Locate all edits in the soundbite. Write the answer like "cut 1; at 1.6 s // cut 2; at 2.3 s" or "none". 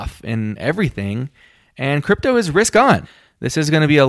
cut 1; at 3.2 s

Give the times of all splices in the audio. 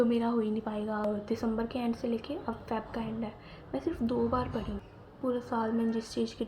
cut 1; at 1.1 s // cut 2; at 4.8 s

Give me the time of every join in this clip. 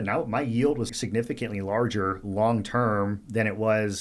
cut 1; at 0.9 s

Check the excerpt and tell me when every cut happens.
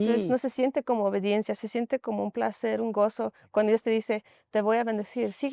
none

